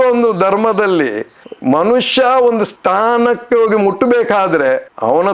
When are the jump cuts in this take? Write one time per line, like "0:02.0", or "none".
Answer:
0:02.7